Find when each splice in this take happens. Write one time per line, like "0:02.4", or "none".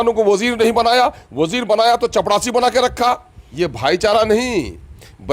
0:03.4

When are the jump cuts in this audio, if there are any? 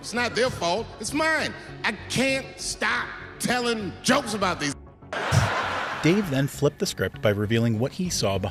none

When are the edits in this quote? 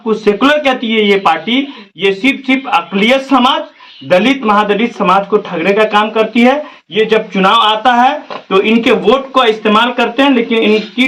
none

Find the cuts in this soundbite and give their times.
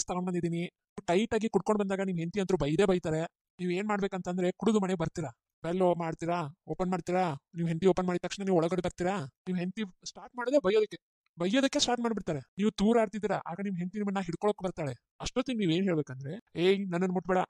none

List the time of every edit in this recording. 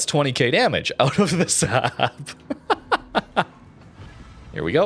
0:03.5

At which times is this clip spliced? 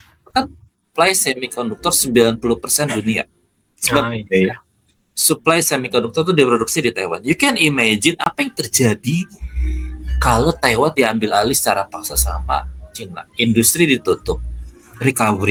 none

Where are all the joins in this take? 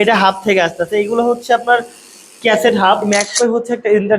0:03.0

